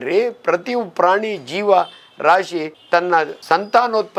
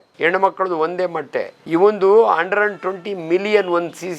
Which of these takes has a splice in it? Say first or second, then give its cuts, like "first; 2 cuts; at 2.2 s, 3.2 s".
second; 1 cut; at 1.6 s